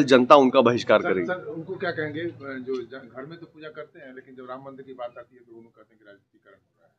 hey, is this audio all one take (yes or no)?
yes